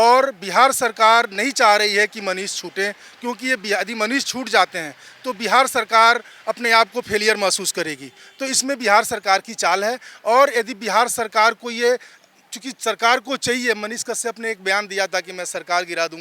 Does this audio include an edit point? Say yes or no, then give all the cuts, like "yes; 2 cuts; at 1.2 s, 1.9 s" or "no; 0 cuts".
no; 0 cuts